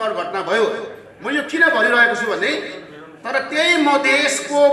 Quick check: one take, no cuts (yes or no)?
yes